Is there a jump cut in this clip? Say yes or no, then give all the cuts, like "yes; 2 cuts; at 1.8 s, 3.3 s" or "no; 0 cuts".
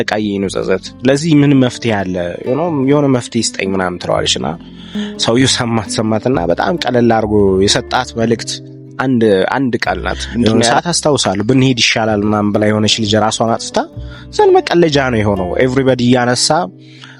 yes; 1 cut; at 10.6 s